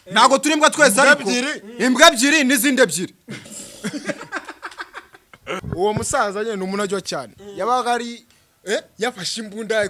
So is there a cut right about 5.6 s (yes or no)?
yes